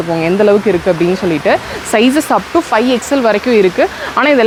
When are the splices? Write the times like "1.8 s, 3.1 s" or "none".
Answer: none